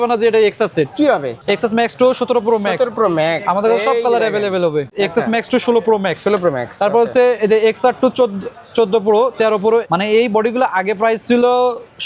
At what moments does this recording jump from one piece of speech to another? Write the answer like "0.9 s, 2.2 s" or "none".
1.3 s, 4.9 s, 9.9 s